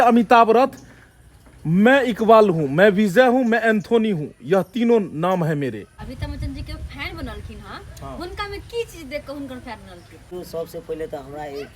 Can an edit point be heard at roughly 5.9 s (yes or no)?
yes